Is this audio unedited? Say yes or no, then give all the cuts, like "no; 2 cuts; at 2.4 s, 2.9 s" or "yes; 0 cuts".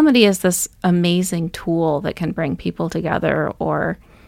yes; 0 cuts